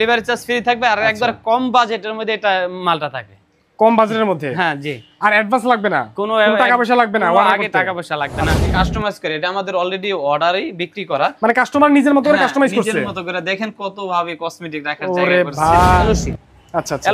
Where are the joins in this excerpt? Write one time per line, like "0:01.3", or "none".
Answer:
0:08.7
0:16.0